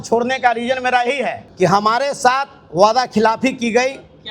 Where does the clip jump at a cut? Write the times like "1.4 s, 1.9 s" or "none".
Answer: 1.4 s